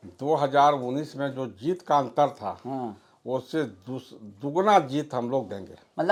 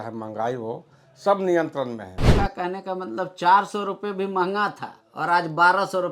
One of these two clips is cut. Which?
second; 1 cut; at 2.3 s

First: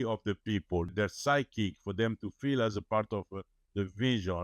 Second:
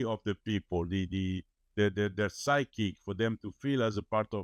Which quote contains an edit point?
first; 1 cut; at 0.9 s

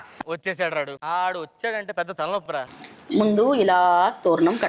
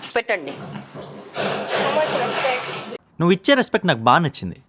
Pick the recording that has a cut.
first; 1 cut; at 2.6 s

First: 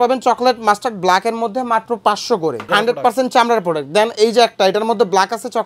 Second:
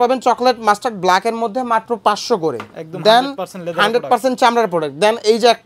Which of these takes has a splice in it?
first; 1 cut; at 2.6 s

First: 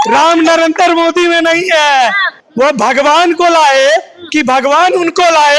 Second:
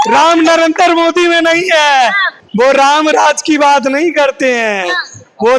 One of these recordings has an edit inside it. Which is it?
first; 1 cut; at 2.4 s

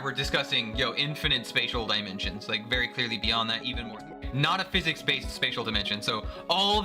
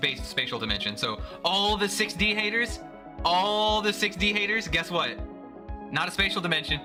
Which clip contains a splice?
first; 1 cut; at 3.7 s

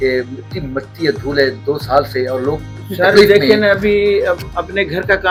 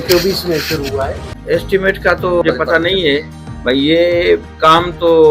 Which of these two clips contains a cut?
second; 1 cut; at 1.3 s

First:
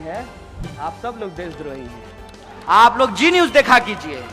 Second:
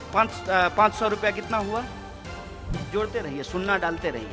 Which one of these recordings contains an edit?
first; 1 cut; at 2.5 s

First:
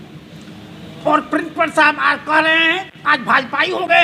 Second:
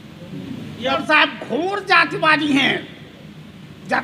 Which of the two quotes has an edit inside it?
second; 1 cut; at 1.0 s

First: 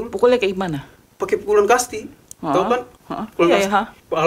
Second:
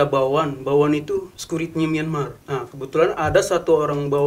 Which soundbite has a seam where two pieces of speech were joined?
second; 2 cuts; at 1.4 s, 2.4 s

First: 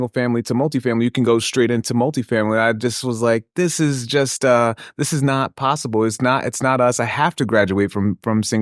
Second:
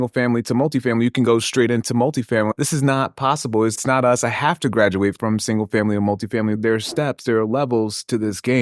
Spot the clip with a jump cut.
second; 4 cuts; at 2.5 s, 3.8 s, 5.2 s, 6.5 s

